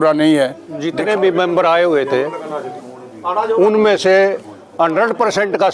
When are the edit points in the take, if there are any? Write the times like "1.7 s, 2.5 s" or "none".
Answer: 1.0 s